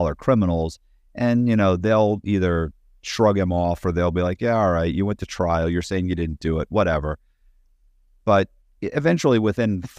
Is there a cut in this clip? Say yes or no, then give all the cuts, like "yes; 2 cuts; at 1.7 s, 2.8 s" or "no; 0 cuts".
no; 0 cuts